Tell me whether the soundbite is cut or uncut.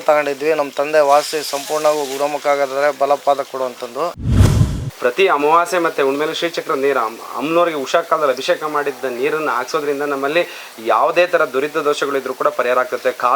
cut